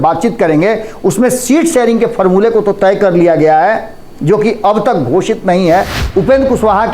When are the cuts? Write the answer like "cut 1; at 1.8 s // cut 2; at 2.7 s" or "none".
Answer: cut 1; at 6.0 s